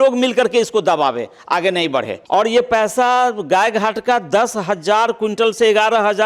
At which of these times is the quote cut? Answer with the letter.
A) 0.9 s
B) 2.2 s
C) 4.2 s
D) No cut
B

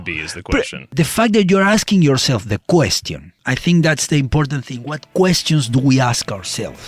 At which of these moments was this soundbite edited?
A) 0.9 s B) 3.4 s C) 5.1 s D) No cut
A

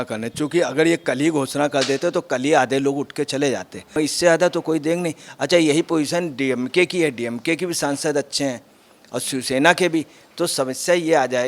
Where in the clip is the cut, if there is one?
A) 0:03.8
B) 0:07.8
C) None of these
A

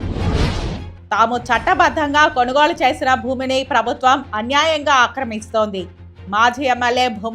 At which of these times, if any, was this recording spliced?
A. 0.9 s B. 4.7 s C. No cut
A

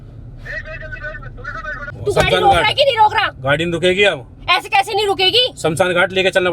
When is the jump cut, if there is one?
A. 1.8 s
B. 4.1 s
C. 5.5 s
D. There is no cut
A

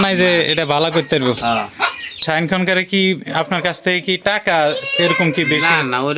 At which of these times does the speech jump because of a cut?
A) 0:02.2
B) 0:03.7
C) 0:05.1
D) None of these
A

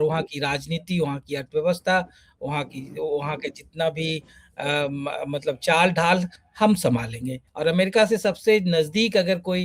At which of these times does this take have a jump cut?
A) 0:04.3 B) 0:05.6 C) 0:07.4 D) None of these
C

